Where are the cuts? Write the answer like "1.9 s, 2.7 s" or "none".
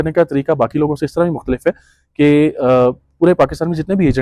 none